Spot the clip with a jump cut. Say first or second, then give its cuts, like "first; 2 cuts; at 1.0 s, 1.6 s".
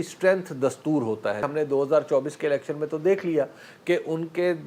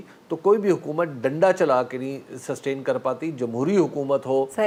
first; 1 cut; at 1.5 s